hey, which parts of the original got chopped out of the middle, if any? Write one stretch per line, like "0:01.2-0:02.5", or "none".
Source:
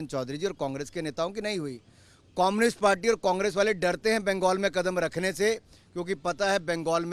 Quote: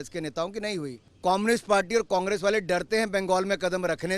0:01.9-0:02.2